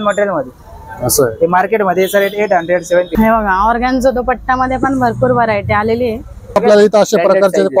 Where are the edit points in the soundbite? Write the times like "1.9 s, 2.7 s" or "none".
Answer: 3.1 s, 6.4 s